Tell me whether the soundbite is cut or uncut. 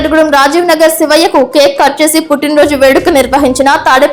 uncut